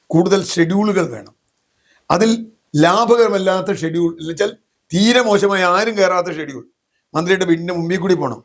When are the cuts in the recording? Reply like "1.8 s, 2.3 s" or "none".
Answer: none